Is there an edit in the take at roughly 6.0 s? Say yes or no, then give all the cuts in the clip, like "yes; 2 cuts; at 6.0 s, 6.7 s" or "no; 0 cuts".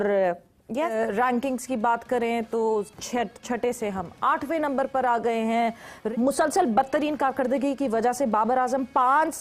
yes; 2 cuts; at 0.9 s, 6.0 s